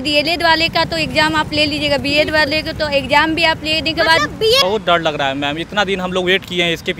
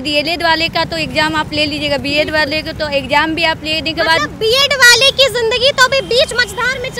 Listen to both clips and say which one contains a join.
first; 1 cut; at 4.6 s

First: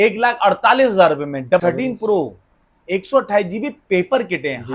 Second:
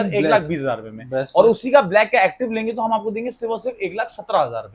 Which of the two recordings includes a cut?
first; 1 cut; at 1.6 s

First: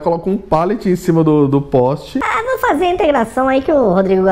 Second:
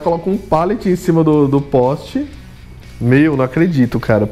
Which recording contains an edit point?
first; 1 cut; at 2.2 s

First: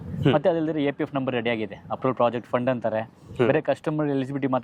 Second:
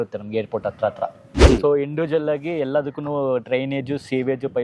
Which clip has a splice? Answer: second; 1 cut; at 1.3 s

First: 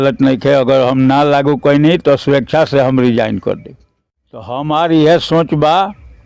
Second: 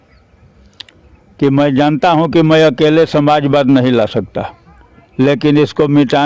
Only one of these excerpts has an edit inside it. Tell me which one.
first; 1 cut; at 4.5 s

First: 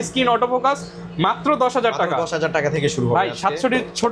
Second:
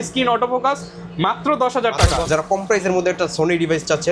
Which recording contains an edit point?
second; 1 cut; at 2.3 s

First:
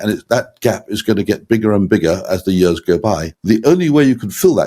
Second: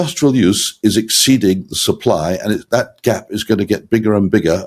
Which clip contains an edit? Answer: first; 1 cut; at 3.3 s

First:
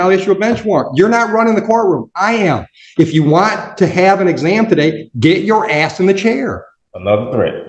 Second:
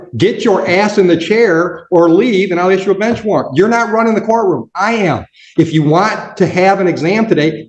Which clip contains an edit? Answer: first; 1 cut; at 6.7 s

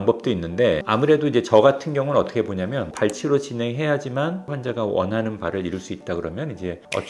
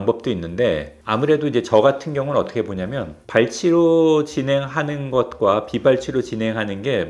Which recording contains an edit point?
first; 3 cuts; at 0.8 s, 2.9 s, 4.5 s

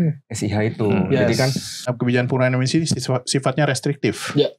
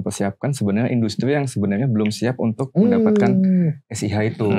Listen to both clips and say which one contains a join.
first; 1 cut; at 1.9 s

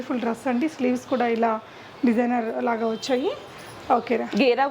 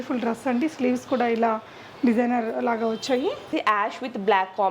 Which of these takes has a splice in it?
second; 1 cut; at 3.5 s

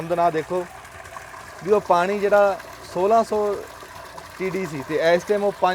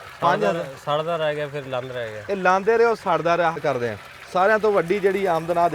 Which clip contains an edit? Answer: second; 1 cut; at 3.6 s

